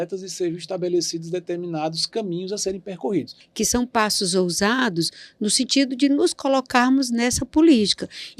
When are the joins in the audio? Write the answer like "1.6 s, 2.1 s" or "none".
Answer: 3.4 s